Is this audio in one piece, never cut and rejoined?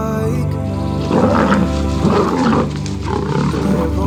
yes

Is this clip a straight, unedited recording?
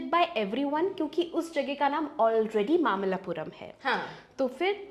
yes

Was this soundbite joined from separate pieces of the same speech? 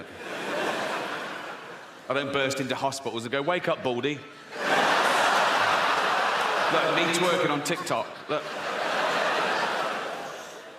yes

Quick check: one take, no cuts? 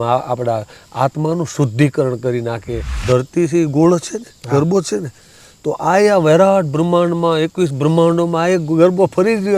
no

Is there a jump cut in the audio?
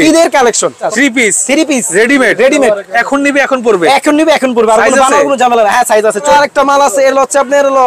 yes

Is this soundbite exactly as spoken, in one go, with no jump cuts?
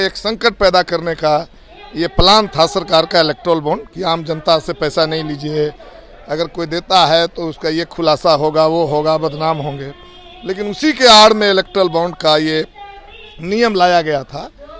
yes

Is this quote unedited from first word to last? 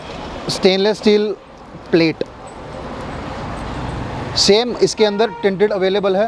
yes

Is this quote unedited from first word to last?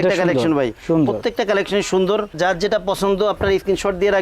yes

